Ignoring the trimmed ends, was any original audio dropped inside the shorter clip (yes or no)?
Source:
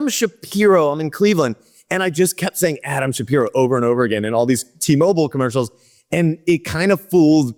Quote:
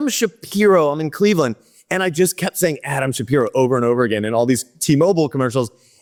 no